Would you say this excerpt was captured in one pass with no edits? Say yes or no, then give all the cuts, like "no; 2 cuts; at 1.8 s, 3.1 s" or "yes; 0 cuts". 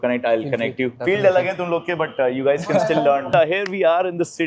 no; 2 cuts; at 1.0 s, 3.3 s